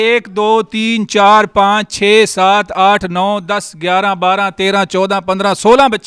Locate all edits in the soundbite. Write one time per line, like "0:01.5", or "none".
none